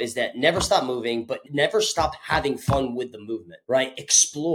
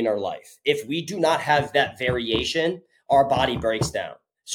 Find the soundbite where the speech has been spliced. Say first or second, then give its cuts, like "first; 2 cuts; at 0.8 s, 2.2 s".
first; 1 cut; at 3.5 s